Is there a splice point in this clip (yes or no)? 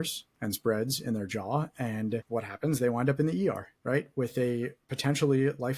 yes